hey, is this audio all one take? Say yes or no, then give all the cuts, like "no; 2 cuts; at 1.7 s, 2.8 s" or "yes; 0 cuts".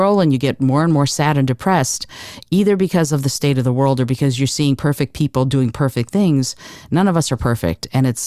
yes; 0 cuts